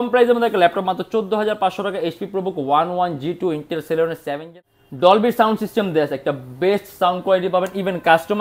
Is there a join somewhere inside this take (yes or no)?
yes